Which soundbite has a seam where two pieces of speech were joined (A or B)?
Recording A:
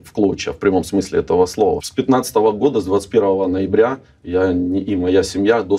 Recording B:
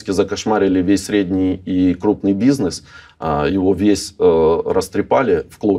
A